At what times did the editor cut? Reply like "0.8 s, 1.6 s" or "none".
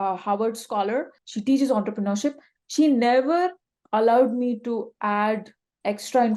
1.2 s